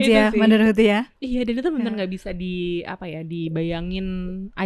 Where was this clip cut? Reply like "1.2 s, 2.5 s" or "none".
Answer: none